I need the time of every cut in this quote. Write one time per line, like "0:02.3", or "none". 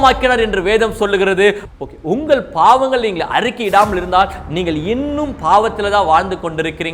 0:01.7